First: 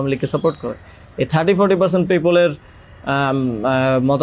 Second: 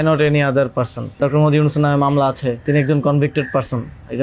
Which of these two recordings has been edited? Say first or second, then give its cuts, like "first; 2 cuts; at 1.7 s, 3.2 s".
second; 2 cuts; at 1.2 s, 2.6 s